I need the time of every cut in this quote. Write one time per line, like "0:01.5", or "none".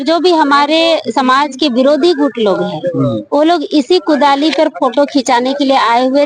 none